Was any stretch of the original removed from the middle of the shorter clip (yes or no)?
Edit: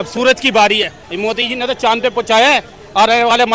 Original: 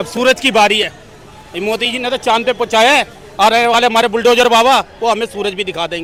yes